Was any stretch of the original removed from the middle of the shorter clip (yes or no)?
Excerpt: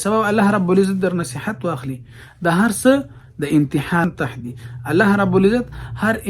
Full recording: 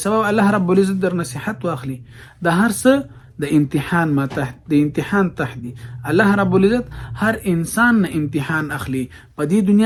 yes